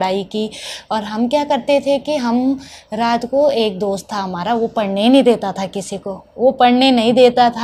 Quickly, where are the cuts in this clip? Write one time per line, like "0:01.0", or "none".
none